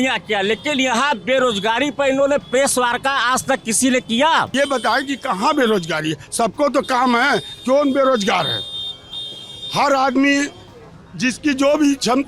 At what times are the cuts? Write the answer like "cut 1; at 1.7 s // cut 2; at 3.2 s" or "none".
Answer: cut 1; at 4.5 s